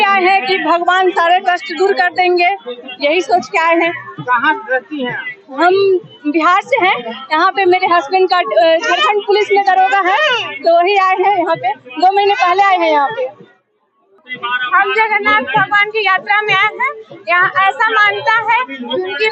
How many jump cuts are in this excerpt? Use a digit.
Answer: 0